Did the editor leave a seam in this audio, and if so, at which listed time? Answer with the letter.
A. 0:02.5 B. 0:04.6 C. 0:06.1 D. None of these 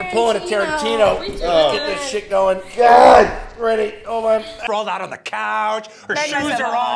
B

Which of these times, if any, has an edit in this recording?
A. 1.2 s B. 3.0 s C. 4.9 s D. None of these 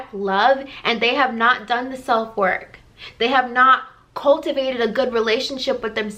D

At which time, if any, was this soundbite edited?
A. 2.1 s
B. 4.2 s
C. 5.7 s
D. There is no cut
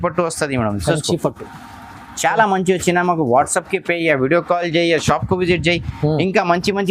D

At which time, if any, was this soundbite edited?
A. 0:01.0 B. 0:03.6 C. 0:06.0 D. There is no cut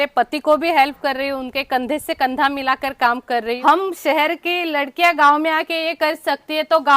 B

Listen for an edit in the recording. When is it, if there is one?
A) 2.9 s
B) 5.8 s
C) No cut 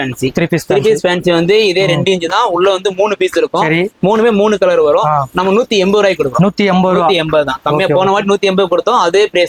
C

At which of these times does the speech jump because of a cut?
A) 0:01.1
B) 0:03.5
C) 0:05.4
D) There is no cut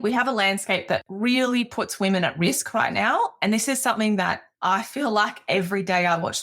A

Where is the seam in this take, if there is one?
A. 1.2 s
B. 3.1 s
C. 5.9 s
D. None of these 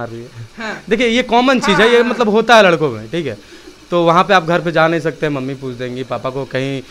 D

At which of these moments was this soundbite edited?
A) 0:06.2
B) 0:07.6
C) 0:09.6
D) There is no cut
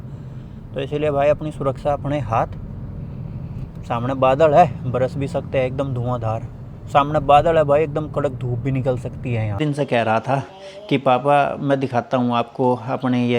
C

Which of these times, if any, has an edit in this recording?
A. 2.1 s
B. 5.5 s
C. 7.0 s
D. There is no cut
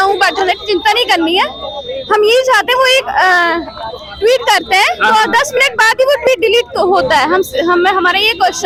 D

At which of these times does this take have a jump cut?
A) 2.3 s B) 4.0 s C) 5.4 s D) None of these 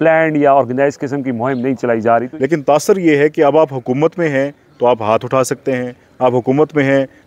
A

